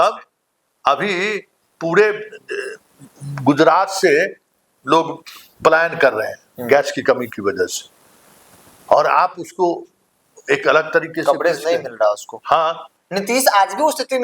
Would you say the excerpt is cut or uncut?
cut